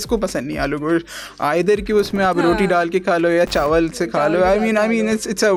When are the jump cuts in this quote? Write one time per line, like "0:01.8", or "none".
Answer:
none